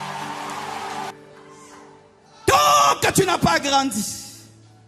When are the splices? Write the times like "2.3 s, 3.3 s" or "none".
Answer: 1.1 s